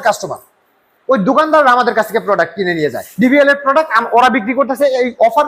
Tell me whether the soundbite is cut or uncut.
uncut